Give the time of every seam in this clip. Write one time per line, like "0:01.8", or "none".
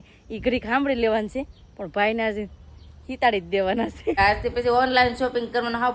0:04.2